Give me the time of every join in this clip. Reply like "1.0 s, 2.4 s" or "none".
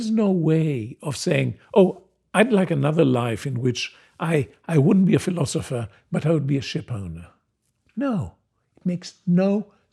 none